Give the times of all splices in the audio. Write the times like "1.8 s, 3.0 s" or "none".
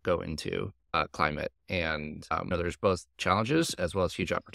2.5 s